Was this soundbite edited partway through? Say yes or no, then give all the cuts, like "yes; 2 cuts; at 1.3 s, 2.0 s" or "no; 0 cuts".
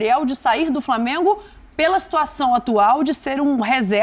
no; 0 cuts